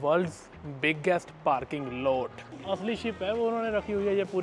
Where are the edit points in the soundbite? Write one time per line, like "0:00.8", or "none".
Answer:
0:02.5